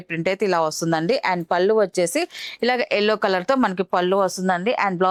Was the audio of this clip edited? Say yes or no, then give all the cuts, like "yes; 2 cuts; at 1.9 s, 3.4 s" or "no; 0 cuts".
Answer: no; 0 cuts